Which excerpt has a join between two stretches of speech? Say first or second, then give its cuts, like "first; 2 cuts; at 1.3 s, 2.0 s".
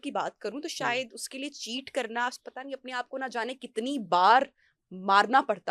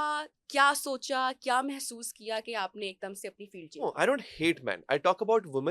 second; 1 cut; at 3.8 s